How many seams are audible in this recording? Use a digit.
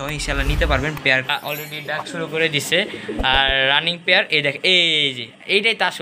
1